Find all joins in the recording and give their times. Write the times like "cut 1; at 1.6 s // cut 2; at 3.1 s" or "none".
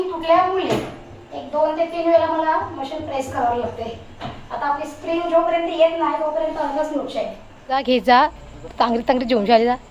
cut 1; at 7.8 s